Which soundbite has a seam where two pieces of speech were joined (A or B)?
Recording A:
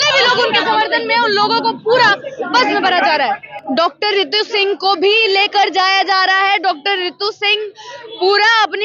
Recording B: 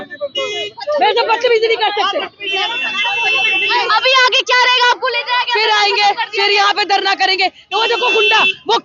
A